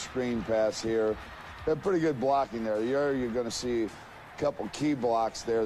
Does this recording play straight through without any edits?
no; 1 cut; at 2.1 s

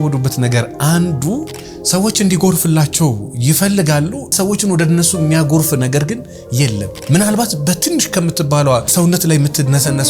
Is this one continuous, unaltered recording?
no; 3 cuts; at 4.3 s, 6.9 s, 8.9 s

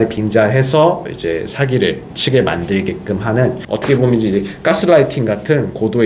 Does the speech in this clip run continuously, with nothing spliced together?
no; 1 cut; at 3.7 s

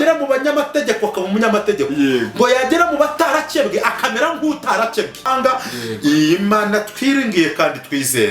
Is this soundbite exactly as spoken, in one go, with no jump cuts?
no; 1 cut; at 5.2 s

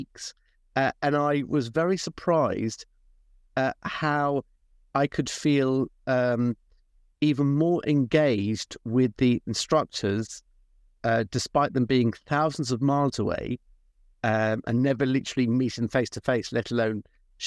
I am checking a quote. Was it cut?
no; 0 cuts

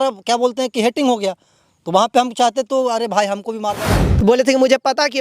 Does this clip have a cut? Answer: yes; 1 cut; at 3.8 s

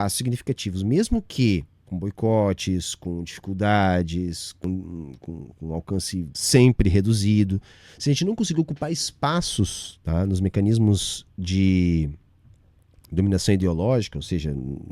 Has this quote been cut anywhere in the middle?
yes; 3 cuts; at 1.8 s, 4.6 s, 6.4 s

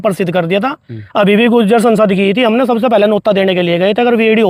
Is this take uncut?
yes; 0 cuts

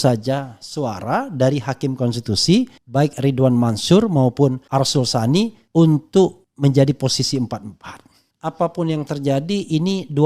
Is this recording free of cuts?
no; 5 cuts; at 2.8 s, 4.6 s, 5.6 s, 6.5 s, 8.4 s

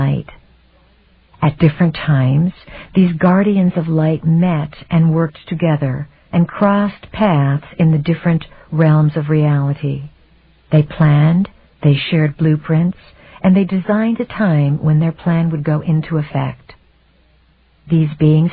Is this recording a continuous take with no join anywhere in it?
yes; 0 cuts

